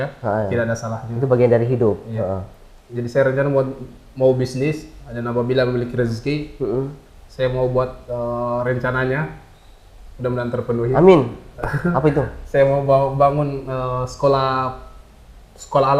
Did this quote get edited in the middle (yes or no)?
no